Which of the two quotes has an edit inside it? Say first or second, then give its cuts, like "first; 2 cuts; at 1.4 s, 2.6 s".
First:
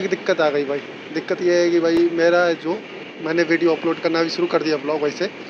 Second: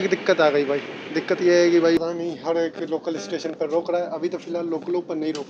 second; 1 cut; at 2.0 s